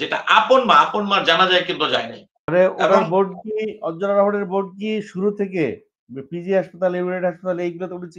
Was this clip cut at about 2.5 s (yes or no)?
yes